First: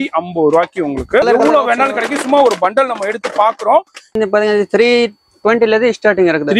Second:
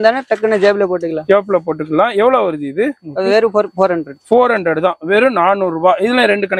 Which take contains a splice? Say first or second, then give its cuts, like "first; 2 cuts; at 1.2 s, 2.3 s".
first; 2 cuts; at 1.2 s, 4.2 s